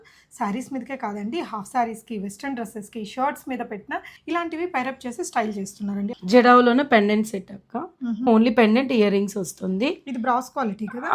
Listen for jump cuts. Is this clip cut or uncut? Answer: cut